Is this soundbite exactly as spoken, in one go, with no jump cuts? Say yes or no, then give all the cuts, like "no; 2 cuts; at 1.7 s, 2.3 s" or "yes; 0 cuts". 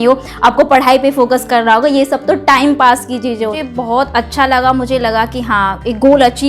no; 1 cut; at 3.5 s